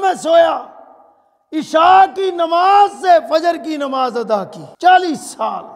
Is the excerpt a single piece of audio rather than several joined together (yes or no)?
no